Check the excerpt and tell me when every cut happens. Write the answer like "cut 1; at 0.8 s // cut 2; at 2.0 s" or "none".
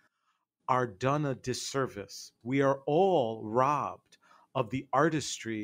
cut 1; at 2.3 s